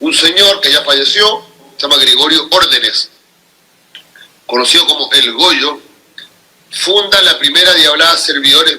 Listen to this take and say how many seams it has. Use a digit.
1